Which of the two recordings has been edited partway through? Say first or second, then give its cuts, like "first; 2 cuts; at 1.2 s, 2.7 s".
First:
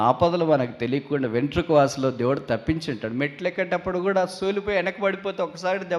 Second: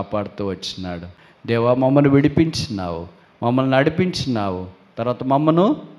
second; 1 cut; at 1.1 s